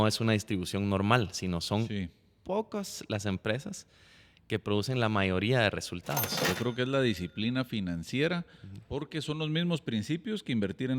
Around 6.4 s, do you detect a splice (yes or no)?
yes